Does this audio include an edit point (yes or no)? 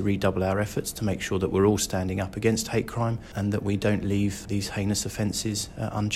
yes